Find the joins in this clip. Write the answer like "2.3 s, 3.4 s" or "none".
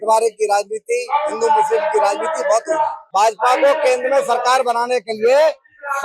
3.0 s